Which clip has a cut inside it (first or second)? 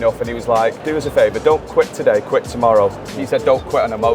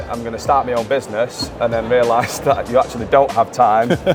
first